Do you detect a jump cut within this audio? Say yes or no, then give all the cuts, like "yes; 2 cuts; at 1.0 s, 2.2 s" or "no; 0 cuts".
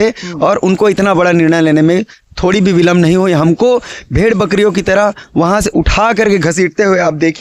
no; 0 cuts